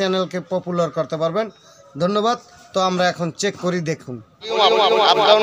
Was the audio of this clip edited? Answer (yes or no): yes